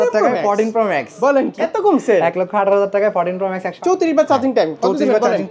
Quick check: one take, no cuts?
no; 2 cuts; at 1.5 s, 3.7 s

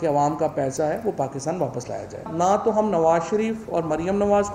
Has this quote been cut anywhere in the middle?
yes; 1 cut; at 2.2 s

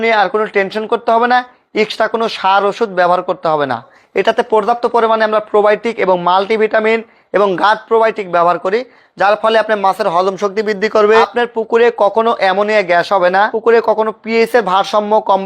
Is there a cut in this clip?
yes; 3 cuts; at 4.0 s, 11.3 s, 13.5 s

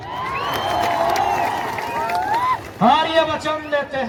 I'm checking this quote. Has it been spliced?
no; 0 cuts

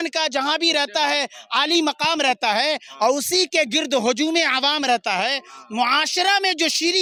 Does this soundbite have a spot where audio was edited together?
no; 0 cuts

